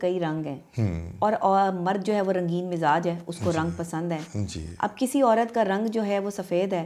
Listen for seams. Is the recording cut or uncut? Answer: uncut